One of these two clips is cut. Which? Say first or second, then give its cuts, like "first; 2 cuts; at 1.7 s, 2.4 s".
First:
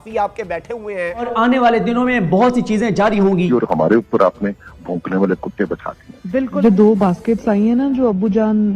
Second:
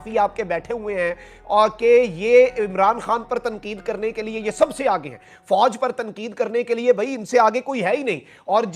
first; 3 cuts; at 1.3 s, 3.5 s, 6.6 s